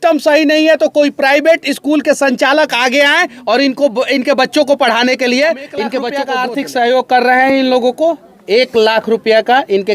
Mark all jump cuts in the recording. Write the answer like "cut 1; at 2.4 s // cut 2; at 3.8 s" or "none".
cut 1; at 6.2 s